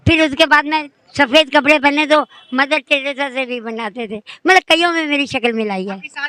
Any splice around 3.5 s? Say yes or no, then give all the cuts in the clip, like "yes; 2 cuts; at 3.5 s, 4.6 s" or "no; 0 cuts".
no; 0 cuts